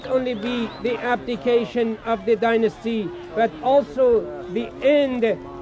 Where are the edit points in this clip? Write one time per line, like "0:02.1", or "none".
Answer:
0:03.3